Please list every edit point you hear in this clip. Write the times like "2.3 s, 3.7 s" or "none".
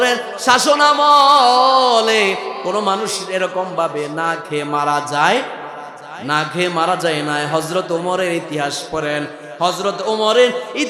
none